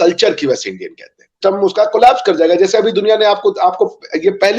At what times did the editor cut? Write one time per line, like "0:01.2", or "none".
0:01.4